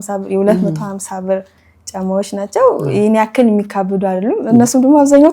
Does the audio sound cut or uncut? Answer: uncut